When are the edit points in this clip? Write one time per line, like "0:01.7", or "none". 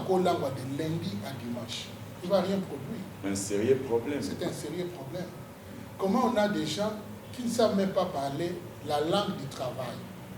none